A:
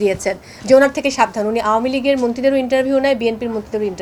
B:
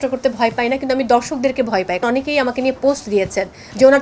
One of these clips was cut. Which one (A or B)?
B